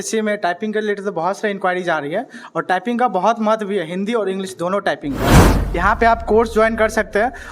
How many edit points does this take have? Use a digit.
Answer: 1